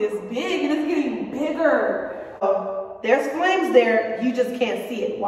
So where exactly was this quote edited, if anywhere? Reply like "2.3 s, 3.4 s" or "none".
2.4 s

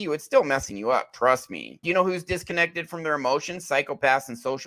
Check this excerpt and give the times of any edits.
1.8 s

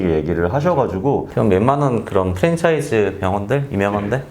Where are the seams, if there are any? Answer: 1.3 s

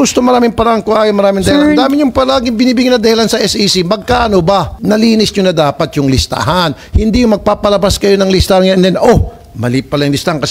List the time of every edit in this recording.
4.7 s

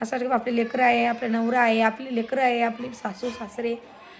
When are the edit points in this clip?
none

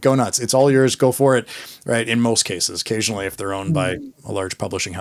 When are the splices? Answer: none

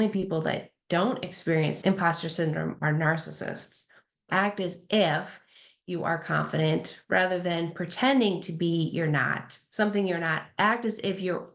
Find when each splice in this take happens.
1.8 s, 4.3 s

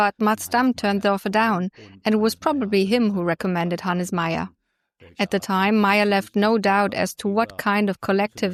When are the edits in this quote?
none

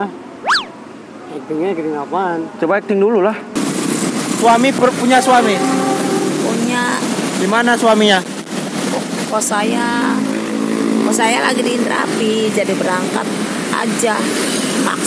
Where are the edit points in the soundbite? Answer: 3.5 s

